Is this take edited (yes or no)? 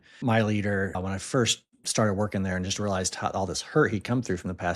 yes